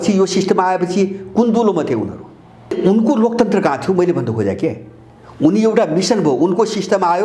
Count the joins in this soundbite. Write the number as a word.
one